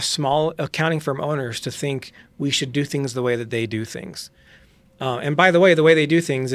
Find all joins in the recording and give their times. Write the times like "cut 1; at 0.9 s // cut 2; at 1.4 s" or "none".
none